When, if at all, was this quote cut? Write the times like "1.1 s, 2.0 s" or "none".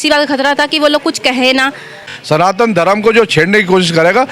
2.2 s